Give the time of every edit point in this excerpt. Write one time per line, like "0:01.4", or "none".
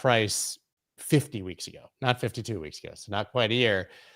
none